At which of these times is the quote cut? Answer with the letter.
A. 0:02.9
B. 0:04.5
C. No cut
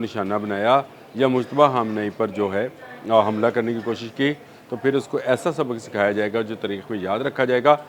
C